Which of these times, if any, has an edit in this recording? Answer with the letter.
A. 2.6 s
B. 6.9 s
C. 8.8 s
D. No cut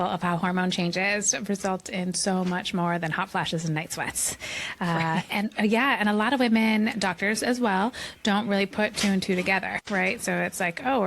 B